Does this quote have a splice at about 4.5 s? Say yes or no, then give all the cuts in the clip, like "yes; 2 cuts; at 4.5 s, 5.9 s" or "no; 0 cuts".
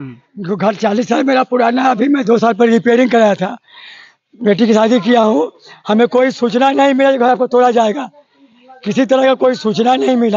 no; 0 cuts